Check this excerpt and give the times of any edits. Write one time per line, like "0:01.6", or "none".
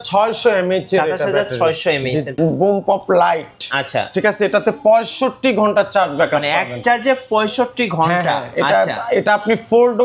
0:02.3